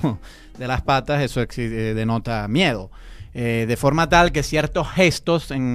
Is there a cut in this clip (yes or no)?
yes